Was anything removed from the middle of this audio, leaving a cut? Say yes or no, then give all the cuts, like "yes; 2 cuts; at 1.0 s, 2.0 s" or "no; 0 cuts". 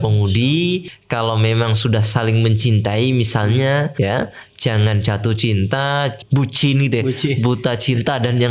yes; 3 cuts; at 1.0 s, 3.9 s, 6.2 s